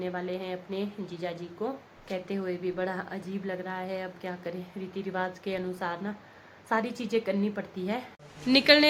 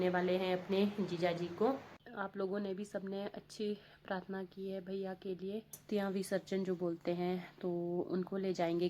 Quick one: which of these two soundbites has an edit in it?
second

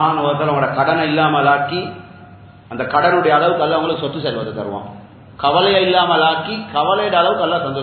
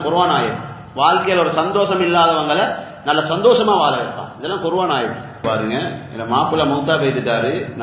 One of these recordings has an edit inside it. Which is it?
second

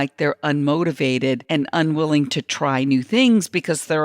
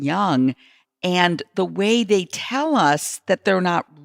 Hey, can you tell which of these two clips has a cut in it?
first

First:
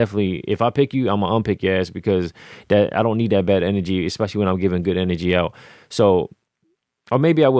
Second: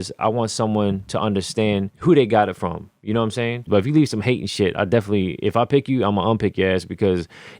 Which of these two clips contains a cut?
second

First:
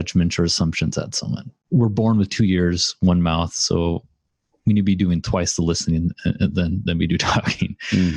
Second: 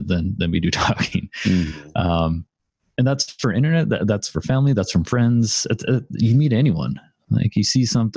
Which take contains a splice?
first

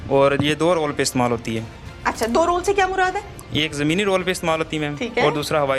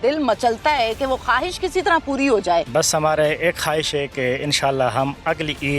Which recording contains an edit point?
second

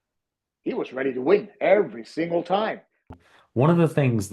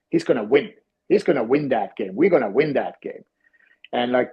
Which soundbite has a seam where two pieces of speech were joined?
first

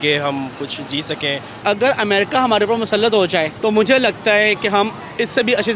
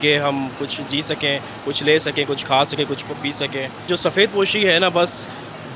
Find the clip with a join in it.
first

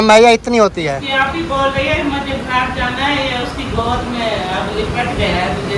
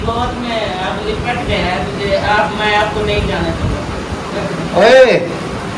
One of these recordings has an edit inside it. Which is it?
first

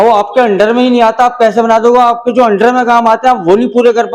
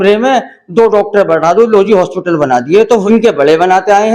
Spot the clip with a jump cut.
second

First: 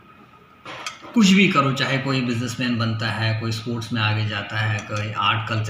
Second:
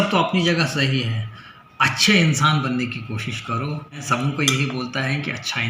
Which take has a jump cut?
second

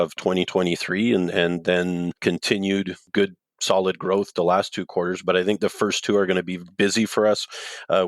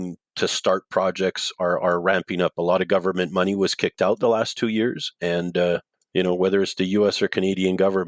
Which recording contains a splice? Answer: first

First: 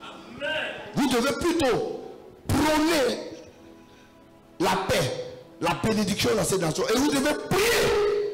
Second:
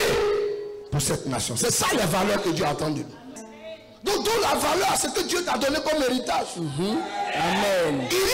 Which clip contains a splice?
second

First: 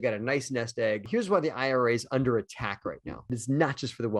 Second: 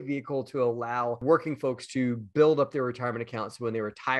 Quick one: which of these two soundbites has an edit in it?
first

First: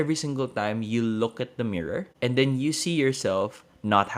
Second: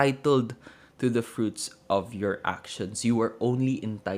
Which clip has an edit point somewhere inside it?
first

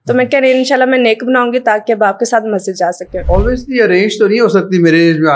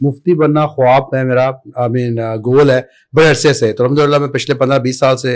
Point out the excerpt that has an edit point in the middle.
first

